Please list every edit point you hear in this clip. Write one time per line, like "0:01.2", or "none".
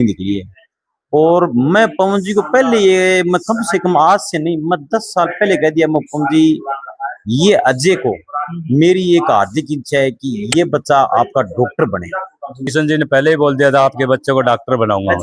0:12.6